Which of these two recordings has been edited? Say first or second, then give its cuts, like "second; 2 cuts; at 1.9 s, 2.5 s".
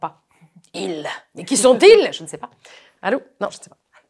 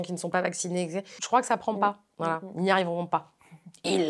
second; 2 cuts; at 1.2 s, 2.1 s